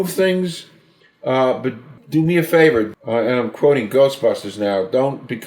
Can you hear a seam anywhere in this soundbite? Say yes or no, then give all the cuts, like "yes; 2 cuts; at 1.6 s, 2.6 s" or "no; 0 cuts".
yes; 2 cuts; at 1.9 s, 2.9 s